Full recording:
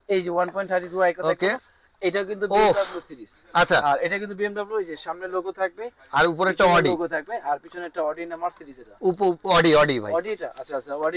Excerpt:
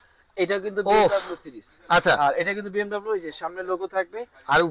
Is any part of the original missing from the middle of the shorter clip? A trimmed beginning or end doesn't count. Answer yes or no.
no